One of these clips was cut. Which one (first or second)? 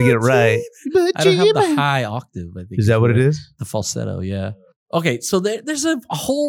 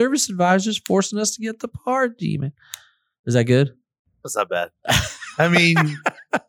first